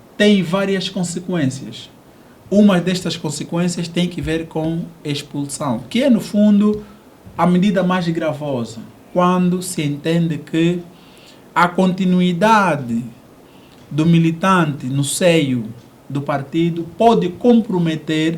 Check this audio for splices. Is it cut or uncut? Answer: uncut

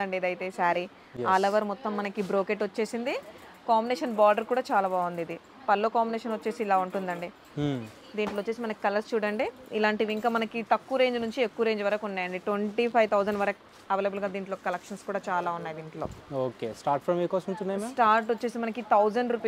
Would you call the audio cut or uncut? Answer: uncut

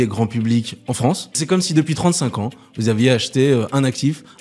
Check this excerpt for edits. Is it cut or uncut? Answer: cut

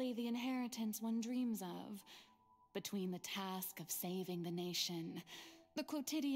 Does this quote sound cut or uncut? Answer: uncut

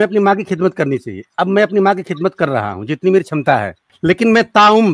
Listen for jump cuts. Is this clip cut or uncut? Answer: cut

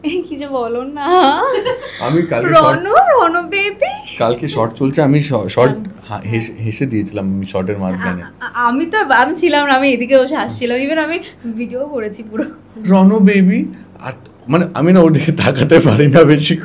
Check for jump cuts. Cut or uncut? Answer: uncut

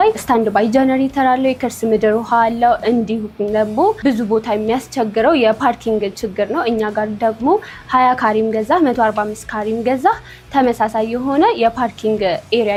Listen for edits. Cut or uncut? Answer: uncut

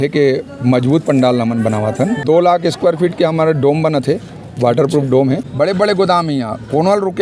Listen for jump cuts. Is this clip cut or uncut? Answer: cut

